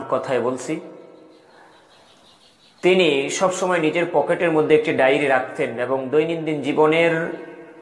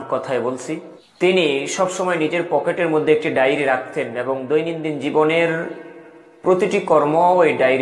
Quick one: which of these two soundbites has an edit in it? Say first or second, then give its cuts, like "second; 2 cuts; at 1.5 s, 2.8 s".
second; 1 cut; at 1.0 s